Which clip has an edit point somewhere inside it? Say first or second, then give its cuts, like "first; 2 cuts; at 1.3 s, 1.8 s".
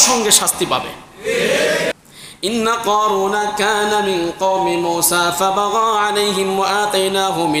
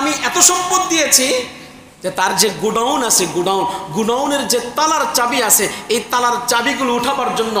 first; 1 cut; at 1.9 s